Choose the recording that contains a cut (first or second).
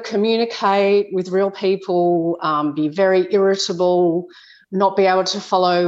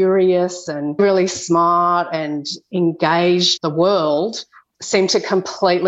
second